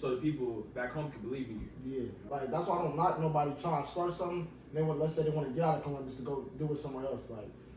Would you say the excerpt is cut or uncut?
cut